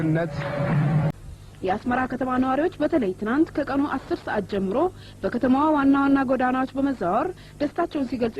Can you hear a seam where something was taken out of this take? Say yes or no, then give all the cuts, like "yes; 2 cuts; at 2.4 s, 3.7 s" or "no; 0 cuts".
yes; 1 cut; at 1.1 s